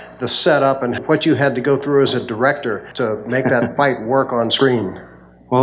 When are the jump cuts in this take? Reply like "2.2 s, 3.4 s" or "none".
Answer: 1.0 s, 2.9 s